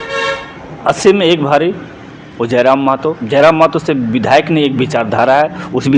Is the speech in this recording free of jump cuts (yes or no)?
yes